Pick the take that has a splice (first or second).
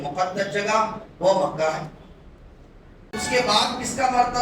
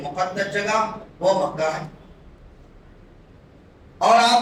first